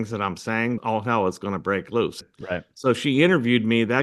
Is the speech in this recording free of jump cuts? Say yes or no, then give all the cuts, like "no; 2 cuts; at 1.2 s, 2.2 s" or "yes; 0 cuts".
no; 2 cuts; at 0.8 s, 2.2 s